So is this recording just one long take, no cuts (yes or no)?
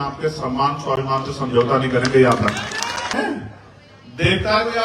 no